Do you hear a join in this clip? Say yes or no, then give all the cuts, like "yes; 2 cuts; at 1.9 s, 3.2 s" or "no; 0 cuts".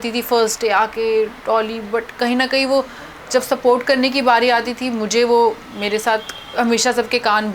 no; 0 cuts